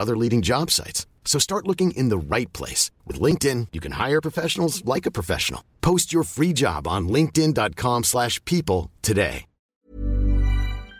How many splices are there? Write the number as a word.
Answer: one